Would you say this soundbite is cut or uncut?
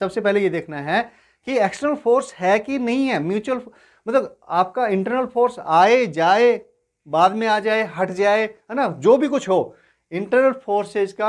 uncut